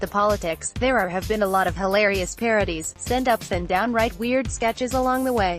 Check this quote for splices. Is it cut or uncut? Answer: uncut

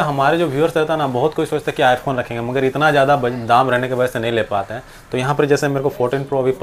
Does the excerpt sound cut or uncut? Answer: uncut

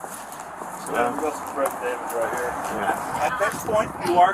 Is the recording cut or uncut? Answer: cut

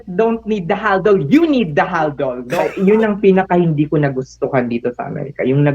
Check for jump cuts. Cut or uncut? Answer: cut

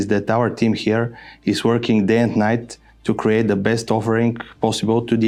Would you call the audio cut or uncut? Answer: uncut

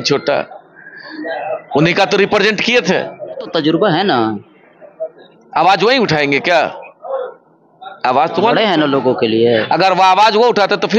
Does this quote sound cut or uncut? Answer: cut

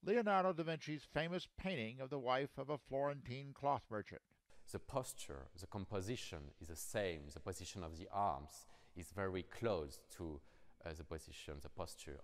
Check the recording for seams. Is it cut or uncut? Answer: uncut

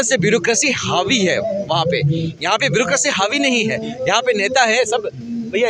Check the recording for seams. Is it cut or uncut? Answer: uncut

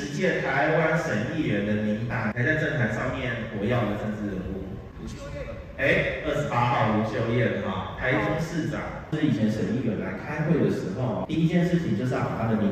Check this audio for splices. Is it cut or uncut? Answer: uncut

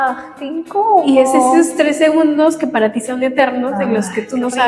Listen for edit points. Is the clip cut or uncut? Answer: uncut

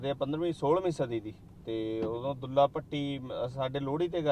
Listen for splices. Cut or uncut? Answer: uncut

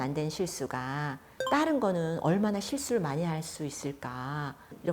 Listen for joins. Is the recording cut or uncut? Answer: cut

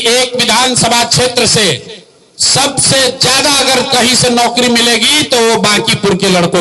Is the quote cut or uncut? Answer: uncut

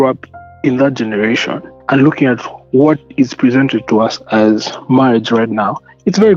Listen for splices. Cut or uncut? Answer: cut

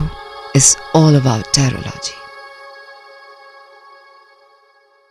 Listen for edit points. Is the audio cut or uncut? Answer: uncut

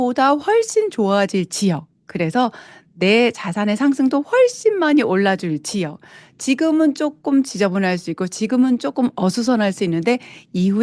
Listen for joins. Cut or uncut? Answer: uncut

